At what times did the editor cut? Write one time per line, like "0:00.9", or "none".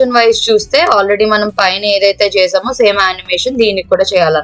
none